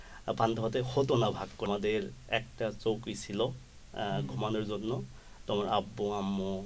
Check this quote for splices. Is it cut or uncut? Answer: cut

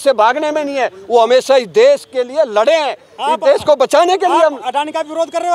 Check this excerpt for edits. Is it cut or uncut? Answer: uncut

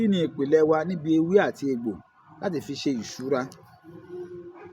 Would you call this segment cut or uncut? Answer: uncut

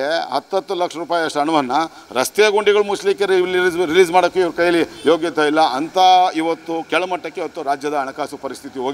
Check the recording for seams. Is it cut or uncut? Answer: uncut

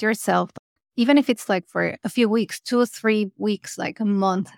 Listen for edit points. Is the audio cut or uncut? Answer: uncut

